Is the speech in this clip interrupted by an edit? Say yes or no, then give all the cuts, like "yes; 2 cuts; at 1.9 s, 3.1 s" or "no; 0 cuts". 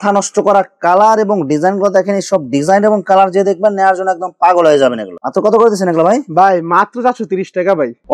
no; 0 cuts